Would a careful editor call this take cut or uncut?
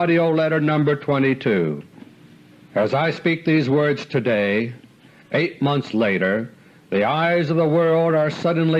cut